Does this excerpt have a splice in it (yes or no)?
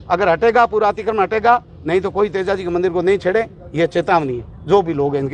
no